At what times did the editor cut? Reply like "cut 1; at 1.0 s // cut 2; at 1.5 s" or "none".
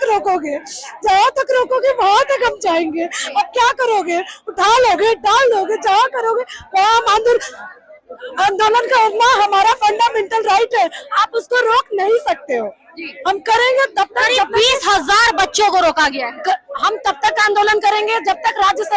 none